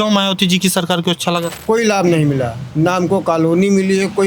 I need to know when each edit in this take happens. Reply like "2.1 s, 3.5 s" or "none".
1.5 s